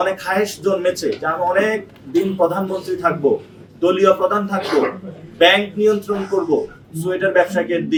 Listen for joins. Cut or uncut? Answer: uncut